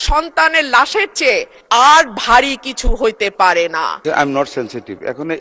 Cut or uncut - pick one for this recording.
cut